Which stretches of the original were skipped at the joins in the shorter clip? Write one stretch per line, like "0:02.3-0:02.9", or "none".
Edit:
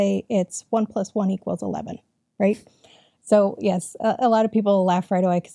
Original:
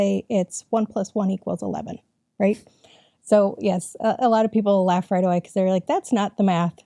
none